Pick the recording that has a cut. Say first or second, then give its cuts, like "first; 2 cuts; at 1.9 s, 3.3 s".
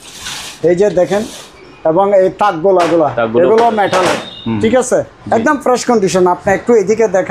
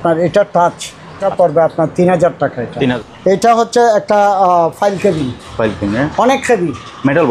second; 2 cuts; at 1.2 s, 2.9 s